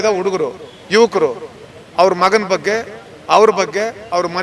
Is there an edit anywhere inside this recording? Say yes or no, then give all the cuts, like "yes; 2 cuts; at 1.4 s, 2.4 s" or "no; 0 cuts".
no; 0 cuts